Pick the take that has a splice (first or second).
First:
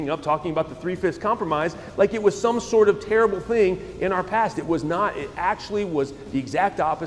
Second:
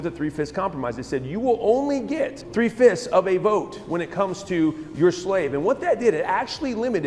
second